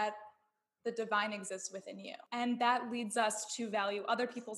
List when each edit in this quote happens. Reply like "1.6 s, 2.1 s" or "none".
2.3 s